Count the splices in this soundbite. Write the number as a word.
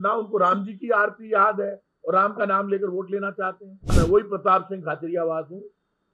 one